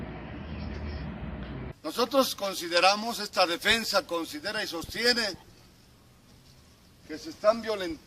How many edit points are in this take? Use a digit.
1